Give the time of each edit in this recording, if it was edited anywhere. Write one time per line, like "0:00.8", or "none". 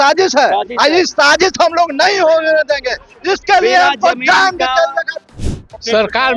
0:05.3